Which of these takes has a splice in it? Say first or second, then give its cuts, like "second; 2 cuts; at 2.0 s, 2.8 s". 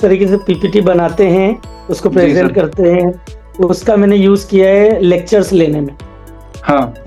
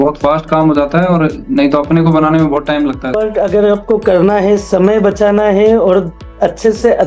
second; 1 cut; at 3.2 s